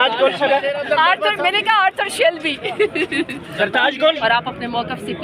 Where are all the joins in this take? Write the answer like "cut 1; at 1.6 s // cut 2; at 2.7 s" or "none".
cut 1; at 4.2 s